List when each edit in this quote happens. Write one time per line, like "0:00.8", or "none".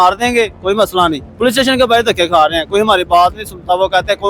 0:01.2